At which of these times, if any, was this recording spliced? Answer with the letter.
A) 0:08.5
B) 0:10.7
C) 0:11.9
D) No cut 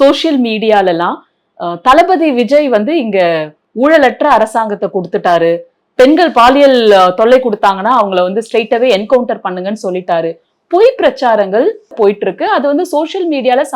C